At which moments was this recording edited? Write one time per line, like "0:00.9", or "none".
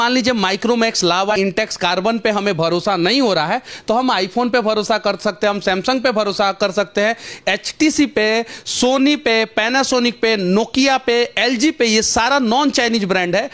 0:01.3